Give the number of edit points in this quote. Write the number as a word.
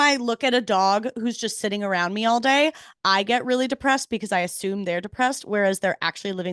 zero